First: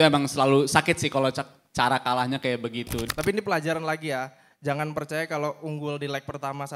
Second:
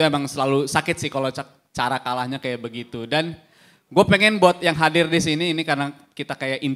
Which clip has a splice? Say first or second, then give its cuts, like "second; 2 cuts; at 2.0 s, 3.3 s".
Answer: first; 1 cut; at 3.0 s